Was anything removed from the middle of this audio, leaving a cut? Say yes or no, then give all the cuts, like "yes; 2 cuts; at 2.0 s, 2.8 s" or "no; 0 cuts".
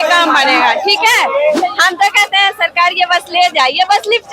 yes; 1 cut; at 1.6 s